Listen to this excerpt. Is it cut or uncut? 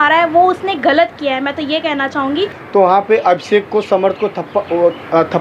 cut